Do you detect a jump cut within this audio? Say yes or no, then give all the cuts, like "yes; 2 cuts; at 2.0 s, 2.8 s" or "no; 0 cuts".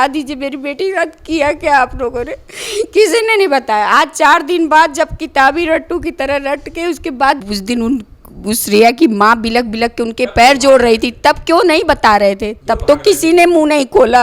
yes; 1 cut; at 7.4 s